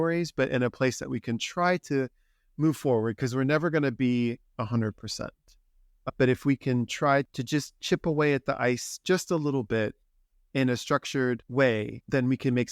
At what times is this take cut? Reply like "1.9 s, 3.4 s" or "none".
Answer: 7.3 s, 11.4 s